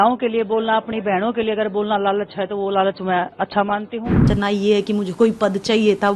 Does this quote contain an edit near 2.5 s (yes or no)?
no